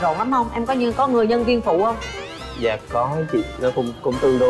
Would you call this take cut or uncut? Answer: uncut